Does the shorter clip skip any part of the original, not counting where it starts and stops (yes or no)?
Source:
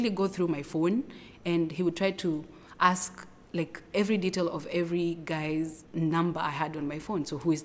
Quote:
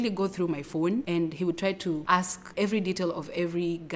yes